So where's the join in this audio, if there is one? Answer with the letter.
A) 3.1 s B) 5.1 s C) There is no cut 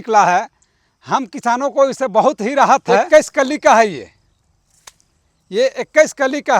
A